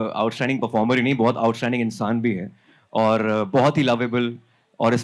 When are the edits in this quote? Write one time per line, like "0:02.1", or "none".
none